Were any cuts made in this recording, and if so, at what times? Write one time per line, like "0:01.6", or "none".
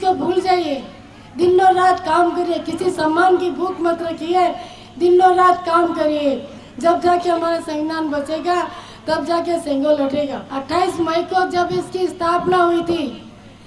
0:10.5